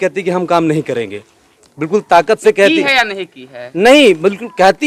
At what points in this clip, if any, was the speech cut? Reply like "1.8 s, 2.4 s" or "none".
none